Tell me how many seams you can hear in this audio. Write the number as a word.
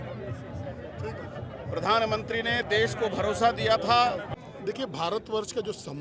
one